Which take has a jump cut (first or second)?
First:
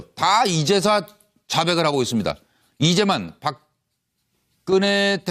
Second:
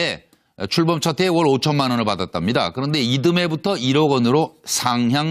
second